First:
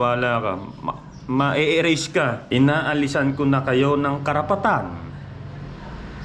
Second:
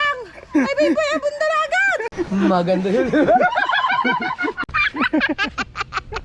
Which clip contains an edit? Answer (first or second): first